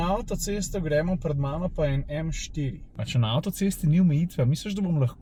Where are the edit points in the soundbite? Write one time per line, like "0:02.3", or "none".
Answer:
none